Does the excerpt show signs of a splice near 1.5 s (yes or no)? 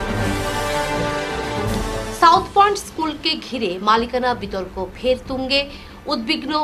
yes